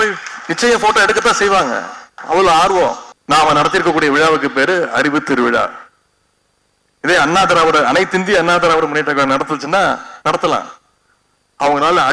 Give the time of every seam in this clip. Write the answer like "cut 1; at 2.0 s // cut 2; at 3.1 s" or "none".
cut 1; at 3.1 s